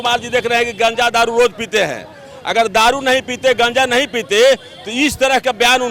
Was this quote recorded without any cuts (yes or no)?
yes